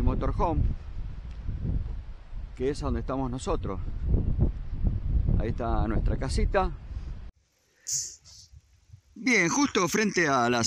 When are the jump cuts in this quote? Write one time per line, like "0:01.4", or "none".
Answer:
0:07.3